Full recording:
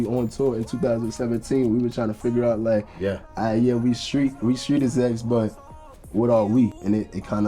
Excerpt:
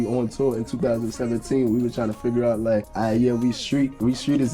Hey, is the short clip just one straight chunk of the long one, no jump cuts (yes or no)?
no